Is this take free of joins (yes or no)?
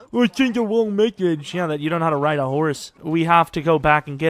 no